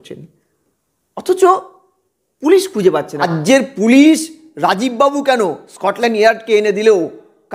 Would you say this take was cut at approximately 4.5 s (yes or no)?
no